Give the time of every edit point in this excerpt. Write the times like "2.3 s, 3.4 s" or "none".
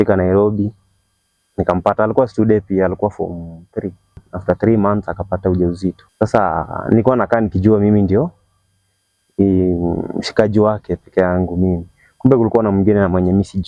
4.3 s, 6.0 s